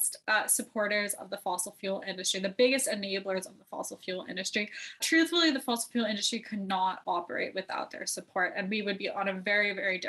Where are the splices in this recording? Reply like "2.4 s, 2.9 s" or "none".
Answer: 5.0 s